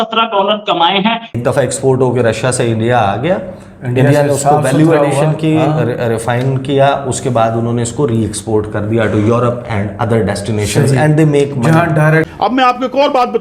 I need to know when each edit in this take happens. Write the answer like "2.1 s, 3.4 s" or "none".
1.4 s, 12.3 s